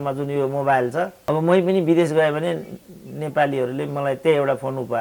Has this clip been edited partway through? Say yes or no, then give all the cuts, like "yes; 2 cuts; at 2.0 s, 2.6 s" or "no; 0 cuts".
no; 0 cuts